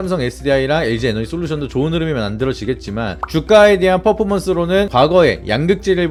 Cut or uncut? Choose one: uncut